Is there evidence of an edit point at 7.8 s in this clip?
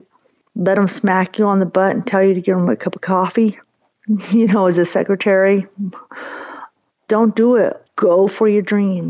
yes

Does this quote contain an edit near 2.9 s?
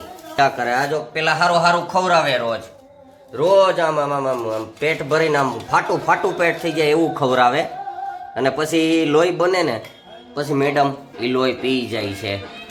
no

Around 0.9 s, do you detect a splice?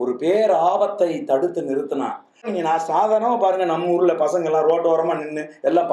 no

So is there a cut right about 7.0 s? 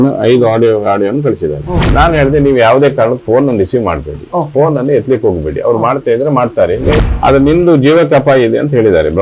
yes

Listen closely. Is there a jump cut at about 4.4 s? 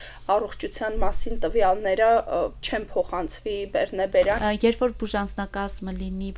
yes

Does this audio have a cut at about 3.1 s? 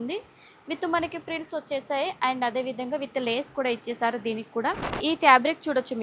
no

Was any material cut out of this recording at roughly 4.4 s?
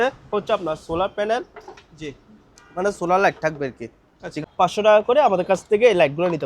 yes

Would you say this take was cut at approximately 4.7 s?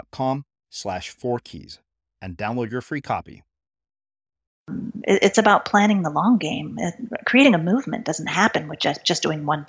yes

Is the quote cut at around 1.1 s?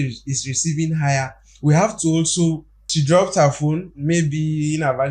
no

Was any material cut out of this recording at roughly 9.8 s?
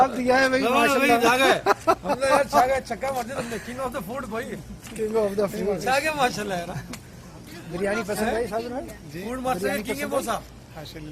no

